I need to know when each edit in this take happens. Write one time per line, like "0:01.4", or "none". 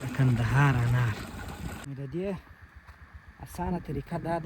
0:01.8